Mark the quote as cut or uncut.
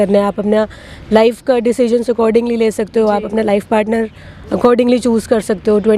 uncut